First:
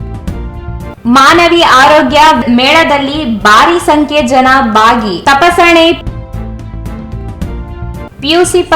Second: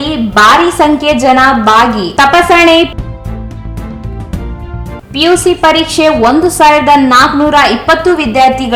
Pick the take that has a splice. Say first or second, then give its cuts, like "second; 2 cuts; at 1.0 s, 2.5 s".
first; 1 cut; at 0.9 s